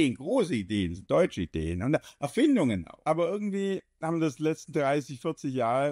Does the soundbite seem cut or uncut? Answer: cut